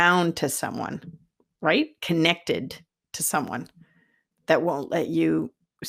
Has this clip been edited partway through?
no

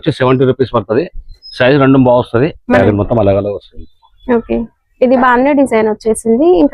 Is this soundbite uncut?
no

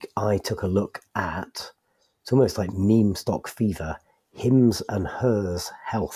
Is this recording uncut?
yes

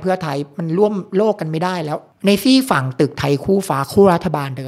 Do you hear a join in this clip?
yes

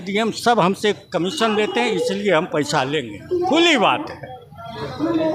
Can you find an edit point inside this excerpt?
no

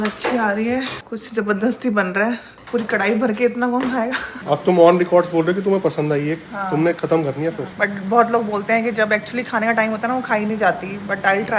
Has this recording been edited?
yes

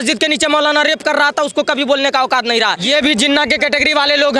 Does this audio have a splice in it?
yes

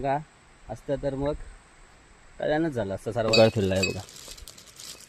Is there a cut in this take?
yes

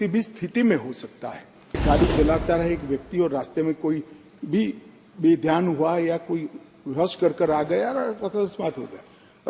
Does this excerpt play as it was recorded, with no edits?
no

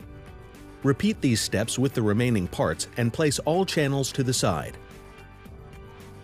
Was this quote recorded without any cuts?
no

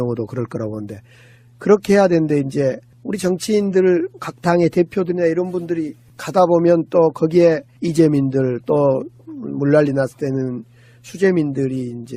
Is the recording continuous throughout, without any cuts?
yes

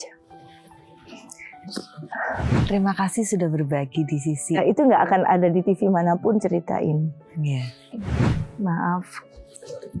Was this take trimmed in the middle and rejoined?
yes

